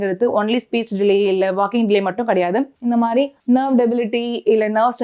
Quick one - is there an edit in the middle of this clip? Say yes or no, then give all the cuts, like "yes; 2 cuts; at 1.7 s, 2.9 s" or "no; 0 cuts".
no; 0 cuts